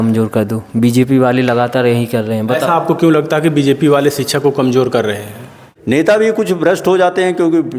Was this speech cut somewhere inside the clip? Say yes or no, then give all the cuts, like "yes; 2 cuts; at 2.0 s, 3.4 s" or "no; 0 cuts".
yes; 1 cut; at 5.6 s